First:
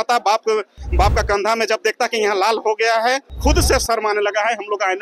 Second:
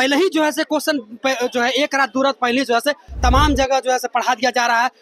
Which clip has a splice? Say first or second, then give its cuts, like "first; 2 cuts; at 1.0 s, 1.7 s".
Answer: first; 1 cut; at 3.4 s